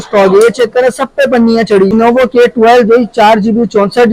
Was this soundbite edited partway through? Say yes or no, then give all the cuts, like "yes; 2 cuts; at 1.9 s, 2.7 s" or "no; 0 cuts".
yes; 1 cut; at 1.9 s